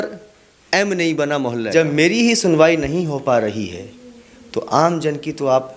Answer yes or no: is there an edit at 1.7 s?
yes